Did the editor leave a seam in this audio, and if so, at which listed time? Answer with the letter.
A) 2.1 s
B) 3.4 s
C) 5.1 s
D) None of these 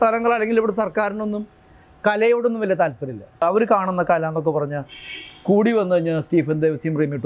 B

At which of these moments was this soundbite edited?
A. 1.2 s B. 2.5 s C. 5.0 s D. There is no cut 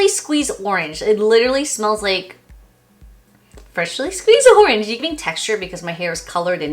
C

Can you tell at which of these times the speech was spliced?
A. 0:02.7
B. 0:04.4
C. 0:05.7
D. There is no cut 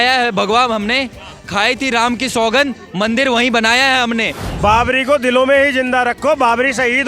B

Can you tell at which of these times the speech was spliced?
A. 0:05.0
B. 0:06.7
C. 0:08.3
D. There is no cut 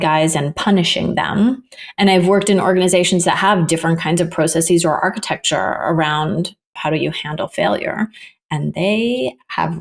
B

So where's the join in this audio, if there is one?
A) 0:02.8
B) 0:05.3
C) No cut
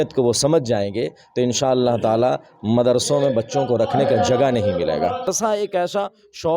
B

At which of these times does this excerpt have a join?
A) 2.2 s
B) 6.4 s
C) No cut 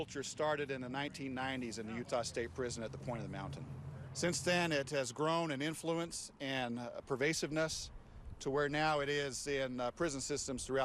C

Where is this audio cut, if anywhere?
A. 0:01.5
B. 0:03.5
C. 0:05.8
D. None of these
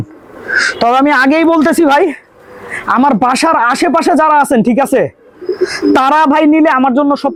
D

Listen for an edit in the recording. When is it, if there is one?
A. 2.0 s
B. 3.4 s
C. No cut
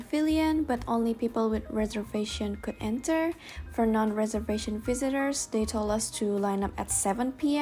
C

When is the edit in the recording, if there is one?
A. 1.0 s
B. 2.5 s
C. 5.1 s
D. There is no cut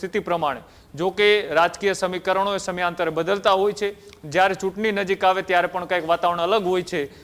D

